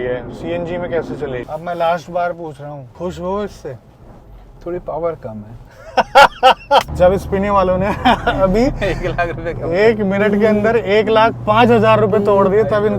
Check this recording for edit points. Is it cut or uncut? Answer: cut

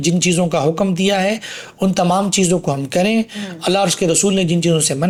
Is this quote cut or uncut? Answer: uncut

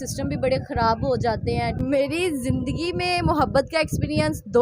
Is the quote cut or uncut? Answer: cut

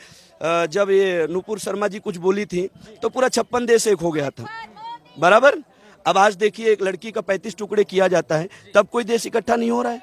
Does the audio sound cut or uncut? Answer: uncut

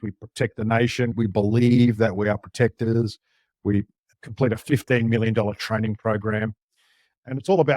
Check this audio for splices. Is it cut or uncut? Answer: cut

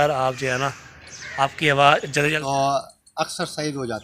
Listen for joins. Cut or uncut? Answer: cut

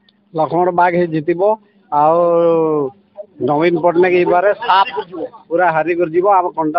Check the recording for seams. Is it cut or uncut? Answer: uncut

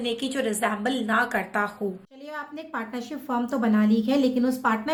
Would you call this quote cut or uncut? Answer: uncut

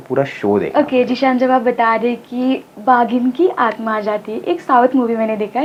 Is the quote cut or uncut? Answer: uncut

